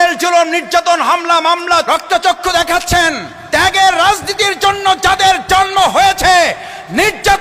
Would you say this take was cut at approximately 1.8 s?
yes; 2 cuts; at 1.8 s, 3.3 s

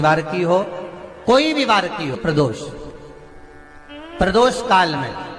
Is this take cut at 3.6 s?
no; 1 cut; at 2.2 s

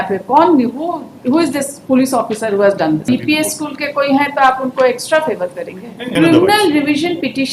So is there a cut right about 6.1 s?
yes; 2 cuts; at 3.0 s, 6.1 s

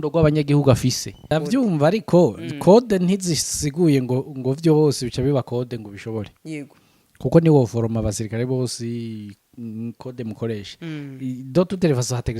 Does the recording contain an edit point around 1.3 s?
yes; 1 cut; at 1.3 s

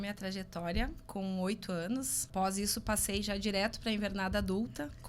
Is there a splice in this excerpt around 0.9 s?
no; 1 cut; at 2.2 s

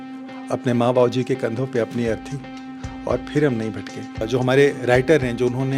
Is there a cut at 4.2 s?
yes; 1 cut; at 4.2 s

